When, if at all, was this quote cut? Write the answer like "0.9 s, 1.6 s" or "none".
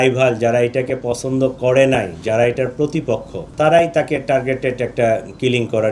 3.4 s